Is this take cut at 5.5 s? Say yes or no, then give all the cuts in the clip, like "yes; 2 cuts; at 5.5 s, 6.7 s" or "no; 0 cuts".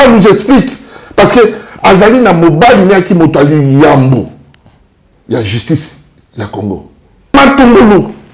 no; 1 cut; at 7.3 s